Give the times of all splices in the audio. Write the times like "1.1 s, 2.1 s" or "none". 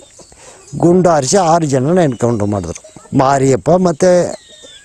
none